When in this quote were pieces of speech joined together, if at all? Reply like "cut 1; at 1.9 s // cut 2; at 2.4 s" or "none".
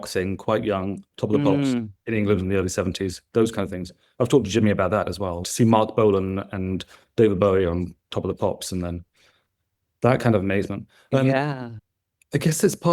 none